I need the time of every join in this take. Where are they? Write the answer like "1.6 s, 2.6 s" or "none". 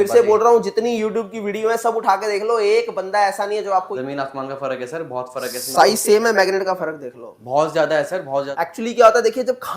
3.9 s, 8.5 s